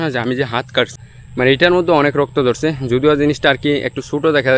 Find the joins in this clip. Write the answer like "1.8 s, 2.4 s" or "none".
1.0 s